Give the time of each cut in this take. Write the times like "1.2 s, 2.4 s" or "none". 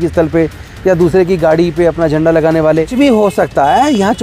2.9 s